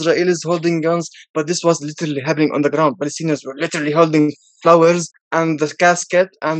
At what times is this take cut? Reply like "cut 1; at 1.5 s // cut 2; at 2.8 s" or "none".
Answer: cut 1; at 5.2 s